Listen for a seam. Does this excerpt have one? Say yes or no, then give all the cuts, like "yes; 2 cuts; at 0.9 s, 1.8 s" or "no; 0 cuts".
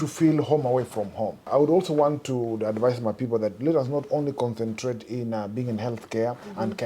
yes; 1 cut; at 1.5 s